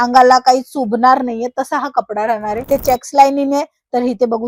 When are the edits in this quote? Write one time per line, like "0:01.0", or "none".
0:02.7